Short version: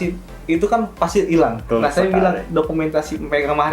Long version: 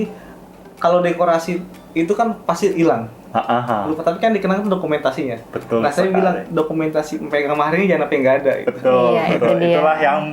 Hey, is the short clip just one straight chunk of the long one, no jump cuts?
no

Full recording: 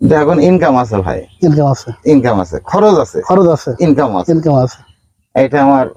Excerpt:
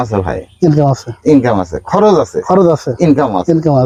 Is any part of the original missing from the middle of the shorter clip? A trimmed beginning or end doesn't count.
no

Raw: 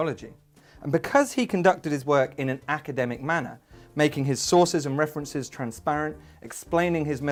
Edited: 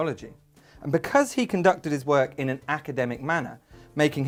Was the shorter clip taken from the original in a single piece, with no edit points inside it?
yes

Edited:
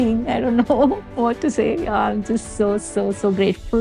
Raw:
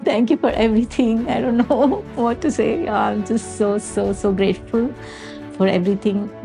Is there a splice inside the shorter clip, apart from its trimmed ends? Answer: no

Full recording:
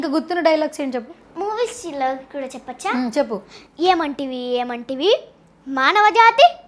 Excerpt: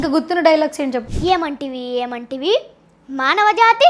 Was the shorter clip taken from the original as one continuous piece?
no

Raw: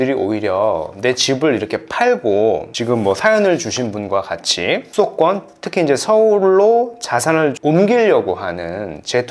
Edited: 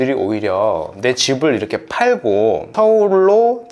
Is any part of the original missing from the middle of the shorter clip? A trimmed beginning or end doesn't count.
yes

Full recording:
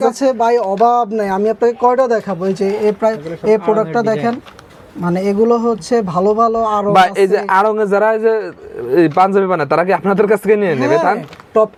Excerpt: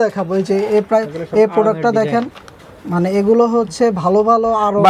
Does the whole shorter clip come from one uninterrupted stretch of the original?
yes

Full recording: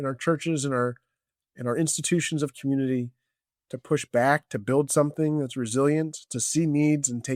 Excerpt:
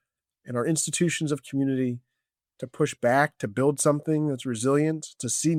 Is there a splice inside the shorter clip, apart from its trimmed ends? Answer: no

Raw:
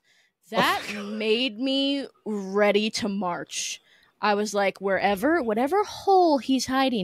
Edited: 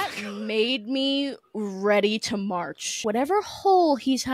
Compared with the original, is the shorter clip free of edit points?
no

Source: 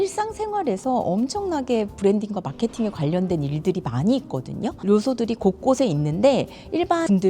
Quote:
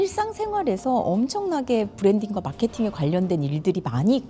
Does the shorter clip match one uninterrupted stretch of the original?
yes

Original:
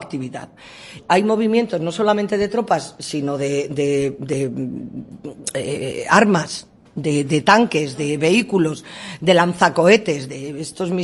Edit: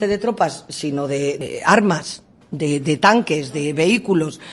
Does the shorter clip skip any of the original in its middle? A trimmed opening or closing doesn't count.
yes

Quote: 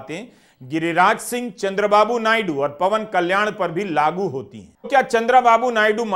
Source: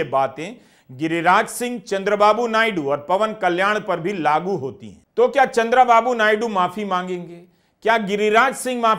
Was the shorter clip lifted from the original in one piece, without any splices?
no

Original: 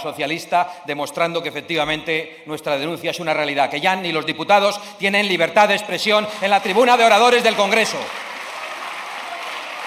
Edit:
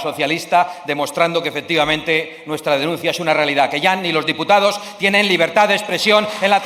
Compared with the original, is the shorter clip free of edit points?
yes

